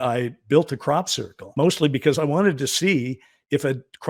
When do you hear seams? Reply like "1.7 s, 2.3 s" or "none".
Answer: 1.4 s

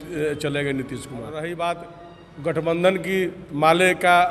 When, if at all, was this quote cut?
1.4 s

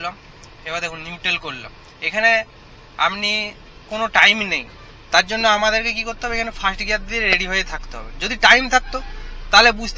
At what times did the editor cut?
none

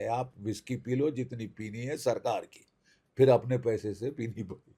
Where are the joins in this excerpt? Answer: none

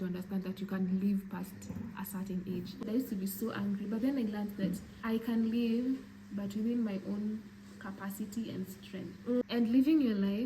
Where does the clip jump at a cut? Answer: 2.8 s, 4.9 s, 9.4 s

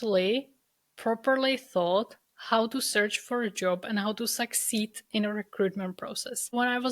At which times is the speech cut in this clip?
none

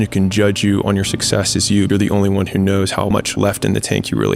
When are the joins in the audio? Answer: 1.9 s, 3.2 s

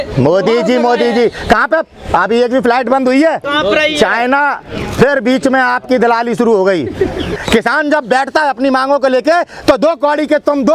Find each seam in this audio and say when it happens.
3.4 s, 7.4 s

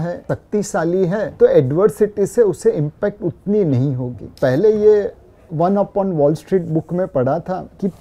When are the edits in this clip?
4.3 s

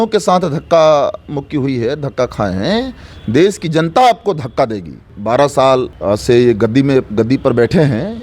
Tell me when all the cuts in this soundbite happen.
5.1 s, 5.9 s

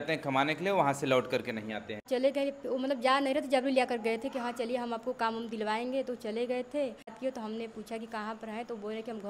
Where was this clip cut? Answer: 2.0 s, 7.2 s

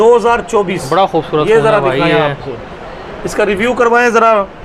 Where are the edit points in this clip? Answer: none

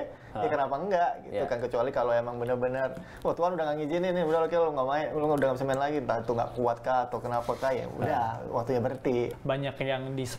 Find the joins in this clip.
9.3 s

